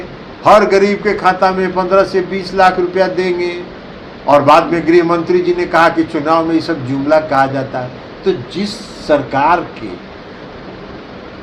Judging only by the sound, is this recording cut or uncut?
uncut